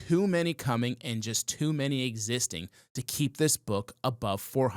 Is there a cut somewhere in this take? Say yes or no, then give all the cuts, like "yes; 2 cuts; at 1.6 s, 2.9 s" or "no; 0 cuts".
no; 0 cuts